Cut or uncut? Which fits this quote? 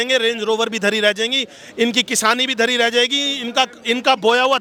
uncut